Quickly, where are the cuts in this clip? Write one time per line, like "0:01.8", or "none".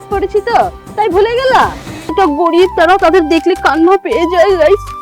0:02.1